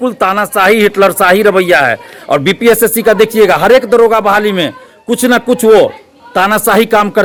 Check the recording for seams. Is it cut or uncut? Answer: uncut